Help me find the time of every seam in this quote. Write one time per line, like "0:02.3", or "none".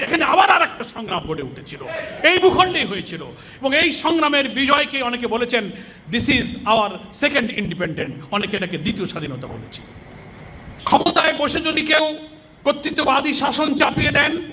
0:10.8